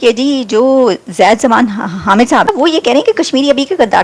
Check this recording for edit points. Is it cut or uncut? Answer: cut